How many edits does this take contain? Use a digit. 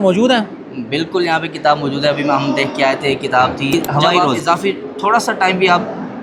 1